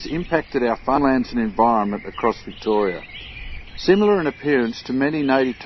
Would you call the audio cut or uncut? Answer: cut